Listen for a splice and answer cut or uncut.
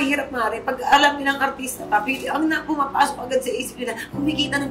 uncut